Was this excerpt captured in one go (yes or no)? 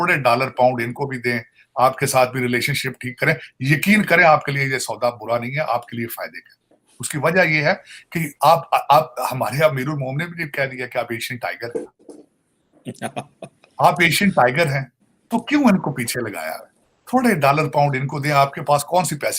yes